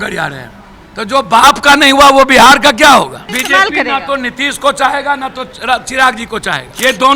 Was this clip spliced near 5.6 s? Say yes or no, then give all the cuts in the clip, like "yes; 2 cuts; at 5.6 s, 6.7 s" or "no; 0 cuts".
no; 1 cut; at 3.2 s